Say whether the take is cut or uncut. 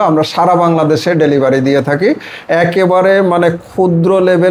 uncut